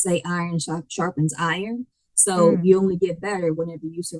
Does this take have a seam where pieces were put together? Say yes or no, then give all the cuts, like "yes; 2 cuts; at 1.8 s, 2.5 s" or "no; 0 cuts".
no; 0 cuts